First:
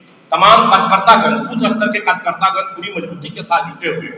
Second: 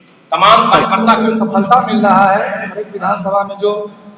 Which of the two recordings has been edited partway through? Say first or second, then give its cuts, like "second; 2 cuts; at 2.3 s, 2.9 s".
second; 1 cut; at 1.2 s